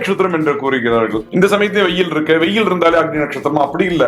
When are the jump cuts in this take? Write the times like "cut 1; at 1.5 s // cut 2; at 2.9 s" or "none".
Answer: cut 1; at 1.2 s